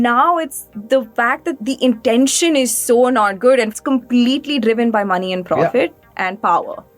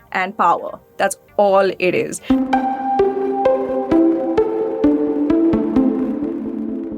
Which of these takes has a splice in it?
second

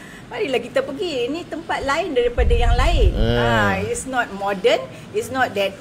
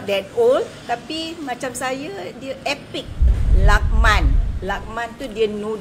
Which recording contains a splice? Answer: second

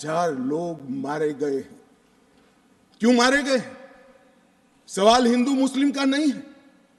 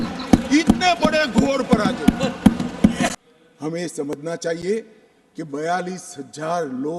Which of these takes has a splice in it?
second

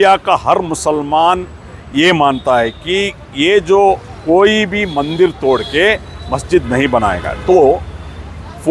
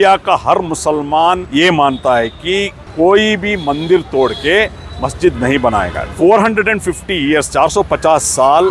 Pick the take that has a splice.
second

